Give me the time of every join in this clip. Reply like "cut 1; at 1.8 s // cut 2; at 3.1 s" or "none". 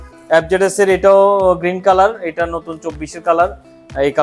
none

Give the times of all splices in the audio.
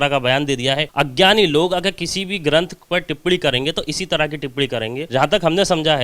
cut 1; at 0.9 s // cut 2; at 5.0 s

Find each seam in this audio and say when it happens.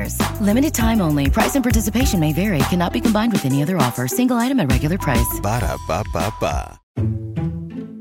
cut 1; at 6.8 s

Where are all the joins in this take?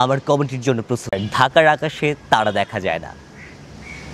cut 1; at 1.1 s

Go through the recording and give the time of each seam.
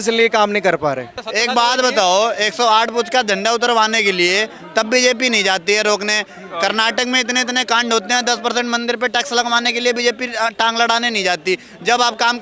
cut 1; at 1.2 s

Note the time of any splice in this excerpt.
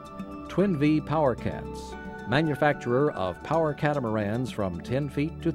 none

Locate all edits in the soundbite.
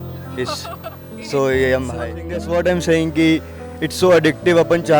cut 1; at 2.3 s

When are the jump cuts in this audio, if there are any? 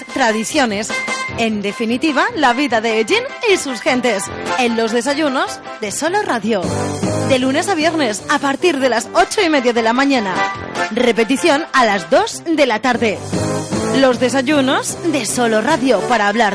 none

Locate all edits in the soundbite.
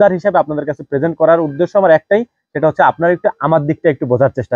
none

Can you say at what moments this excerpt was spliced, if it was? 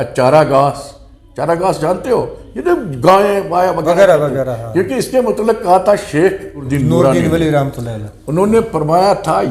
cut 1; at 6.7 s

